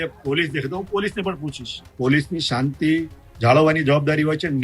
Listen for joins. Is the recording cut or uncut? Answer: cut